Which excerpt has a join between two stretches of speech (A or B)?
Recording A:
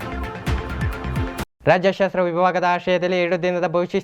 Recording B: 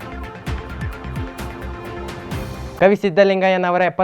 A